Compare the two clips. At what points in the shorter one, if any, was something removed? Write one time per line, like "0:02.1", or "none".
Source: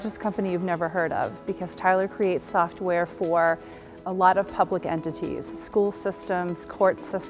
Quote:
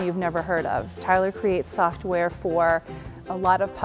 0:00.9